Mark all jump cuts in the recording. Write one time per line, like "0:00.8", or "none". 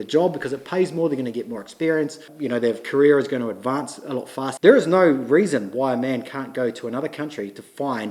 0:02.3
0:04.4

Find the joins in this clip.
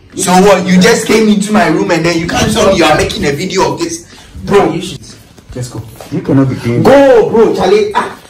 0:04.9

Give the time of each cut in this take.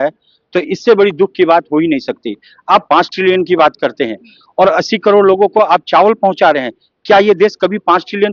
none

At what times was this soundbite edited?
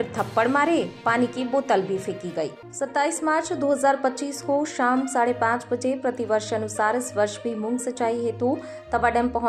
0:02.5

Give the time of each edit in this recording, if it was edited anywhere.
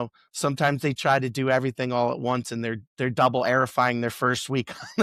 none

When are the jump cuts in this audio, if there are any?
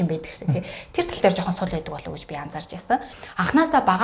0:03.1

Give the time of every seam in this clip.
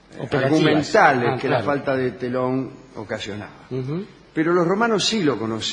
none

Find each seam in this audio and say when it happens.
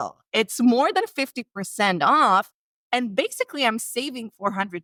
none

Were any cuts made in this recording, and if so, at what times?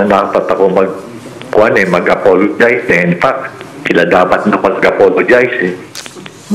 none

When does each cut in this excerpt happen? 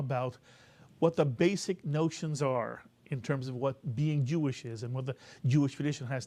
0:04.0

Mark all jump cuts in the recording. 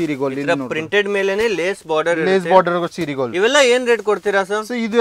none

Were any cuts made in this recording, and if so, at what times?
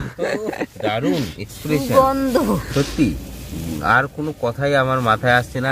none

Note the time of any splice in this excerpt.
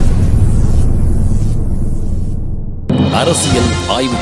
0:02.9

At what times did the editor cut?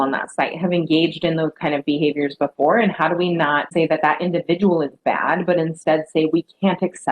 0:03.7

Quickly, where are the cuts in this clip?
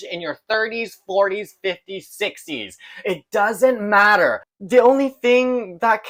none

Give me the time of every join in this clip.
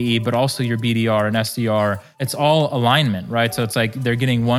0:02.2

